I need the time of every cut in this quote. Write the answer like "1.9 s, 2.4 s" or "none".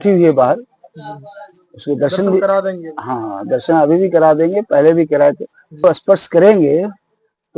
5.8 s